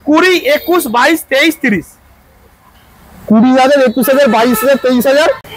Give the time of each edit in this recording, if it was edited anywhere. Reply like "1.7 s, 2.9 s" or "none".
none